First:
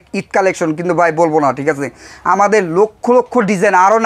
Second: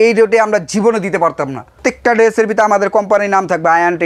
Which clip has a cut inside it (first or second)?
second